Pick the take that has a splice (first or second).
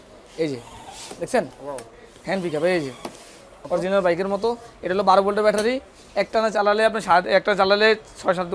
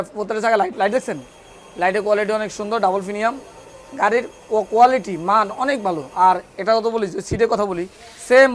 first